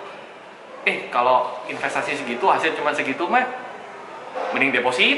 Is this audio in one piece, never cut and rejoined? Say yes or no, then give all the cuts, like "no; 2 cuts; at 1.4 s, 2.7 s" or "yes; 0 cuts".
yes; 0 cuts